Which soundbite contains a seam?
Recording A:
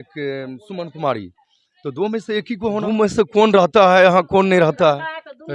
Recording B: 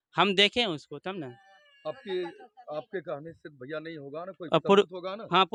A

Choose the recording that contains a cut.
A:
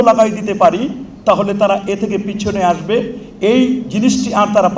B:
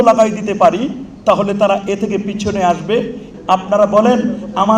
B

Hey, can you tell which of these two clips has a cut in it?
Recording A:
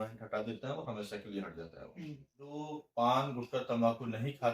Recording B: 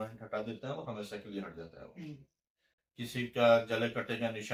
A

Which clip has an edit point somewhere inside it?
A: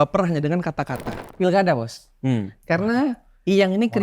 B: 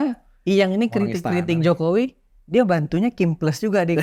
A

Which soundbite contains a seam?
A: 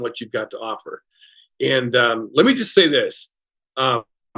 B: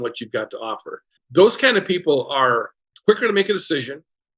B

